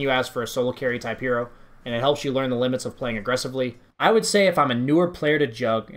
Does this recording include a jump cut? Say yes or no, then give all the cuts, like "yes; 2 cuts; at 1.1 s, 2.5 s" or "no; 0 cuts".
yes; 1 cut; at 3.8 s